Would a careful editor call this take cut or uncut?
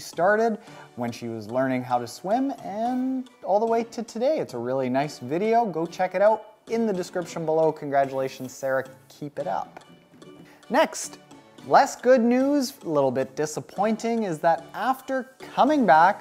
cut